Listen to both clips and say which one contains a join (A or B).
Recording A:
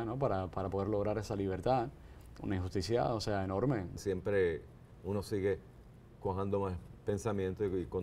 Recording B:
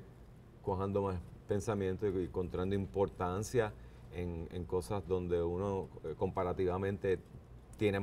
A